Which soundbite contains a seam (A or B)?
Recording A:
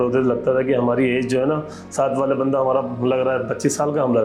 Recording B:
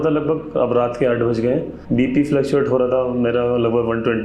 B